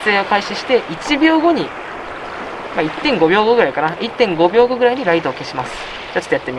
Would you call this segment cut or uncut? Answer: uncut